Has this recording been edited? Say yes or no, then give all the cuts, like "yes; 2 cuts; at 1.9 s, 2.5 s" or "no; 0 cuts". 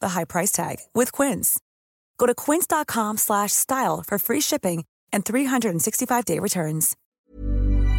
yes; 1 cut; at 7.0 s